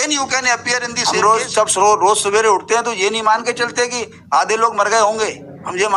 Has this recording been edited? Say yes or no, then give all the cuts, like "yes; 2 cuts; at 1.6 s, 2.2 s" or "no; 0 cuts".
yes; 1 cut; at 1.0 s